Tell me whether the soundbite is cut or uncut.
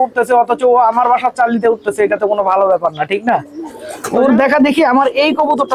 cut